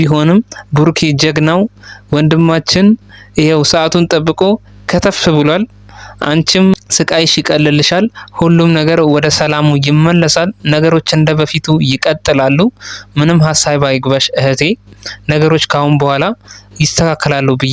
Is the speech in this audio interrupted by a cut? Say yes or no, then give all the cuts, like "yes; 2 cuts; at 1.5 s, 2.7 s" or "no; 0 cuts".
no; 0 cuts